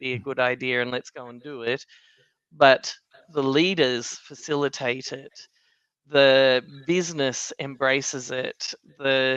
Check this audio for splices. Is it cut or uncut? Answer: uncut